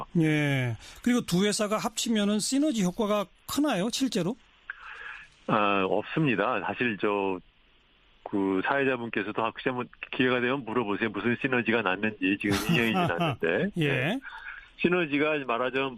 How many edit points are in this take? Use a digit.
0